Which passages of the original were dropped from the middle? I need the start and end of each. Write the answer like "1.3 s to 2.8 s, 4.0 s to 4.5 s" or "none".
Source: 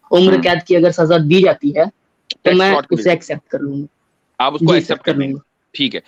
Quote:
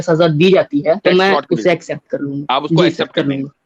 1.9 s to 2.4 s, 3.8 s to 4.3 s